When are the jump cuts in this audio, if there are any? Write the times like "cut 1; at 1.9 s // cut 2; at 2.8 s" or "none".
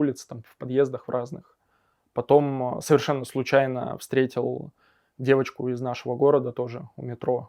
none